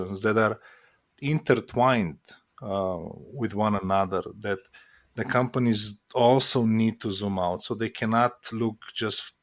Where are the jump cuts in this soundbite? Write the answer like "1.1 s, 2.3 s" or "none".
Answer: none